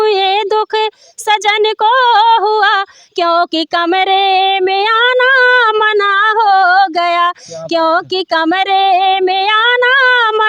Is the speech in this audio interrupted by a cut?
no; 0 cuts

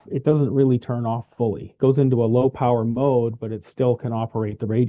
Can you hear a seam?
no; 0 cuts

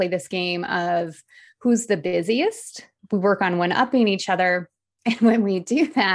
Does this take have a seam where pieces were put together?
yes; 1 cut; at 2.9 s

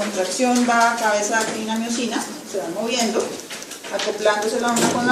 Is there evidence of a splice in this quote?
no; 0 cuts

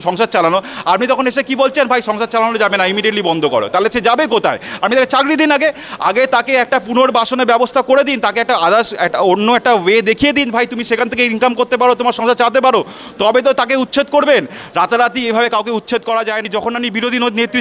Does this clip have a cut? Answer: yes; 1 cut; at 16.5 s

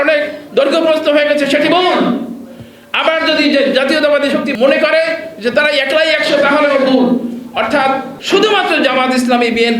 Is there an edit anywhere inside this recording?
yes; 2 cuts; at 4.5 s, 8.1 s

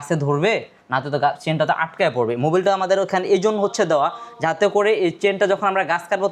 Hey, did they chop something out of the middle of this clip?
no; 0 cuts

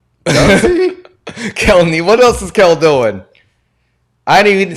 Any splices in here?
no; 0 cuts

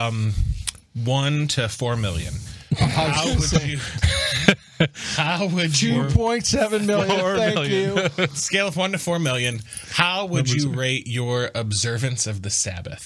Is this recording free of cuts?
yes; 0 cuts

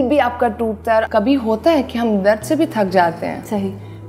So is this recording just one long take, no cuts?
no; 1 cut; at 1.1 s

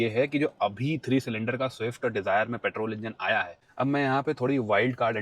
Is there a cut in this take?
yes; 1 cut; at 3.6 s

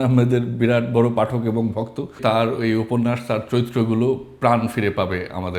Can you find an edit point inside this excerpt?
yes; 1 cut; at 2.2 s

